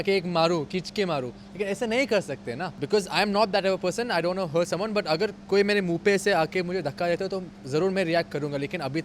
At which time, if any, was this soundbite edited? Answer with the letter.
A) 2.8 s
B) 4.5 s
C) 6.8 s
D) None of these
A